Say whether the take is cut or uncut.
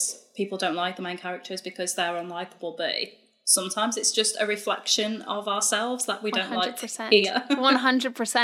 uncut